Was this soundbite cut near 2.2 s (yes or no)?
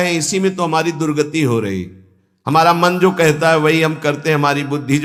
no